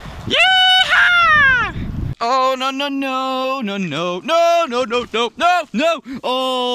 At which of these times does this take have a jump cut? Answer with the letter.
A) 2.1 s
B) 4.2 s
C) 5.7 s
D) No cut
A